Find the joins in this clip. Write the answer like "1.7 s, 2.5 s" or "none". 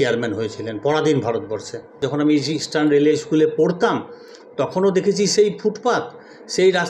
2.0 s